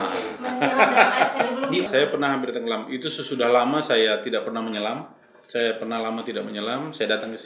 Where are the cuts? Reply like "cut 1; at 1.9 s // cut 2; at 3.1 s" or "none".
cut 1; at 1.9 s